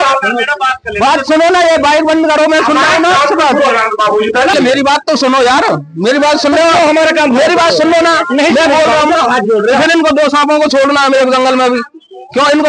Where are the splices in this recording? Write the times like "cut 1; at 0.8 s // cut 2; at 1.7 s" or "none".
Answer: cut 1; at 4.5 s